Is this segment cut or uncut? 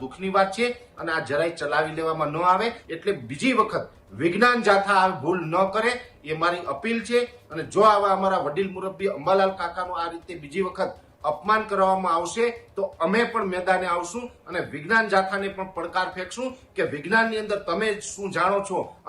cut